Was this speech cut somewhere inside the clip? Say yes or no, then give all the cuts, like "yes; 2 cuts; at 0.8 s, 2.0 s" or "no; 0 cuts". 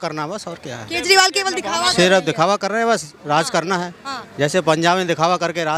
no; 0 cuts